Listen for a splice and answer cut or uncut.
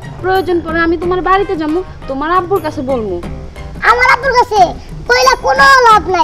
uncut